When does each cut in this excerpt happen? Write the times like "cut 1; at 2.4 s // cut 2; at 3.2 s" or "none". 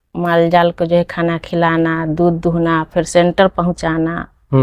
none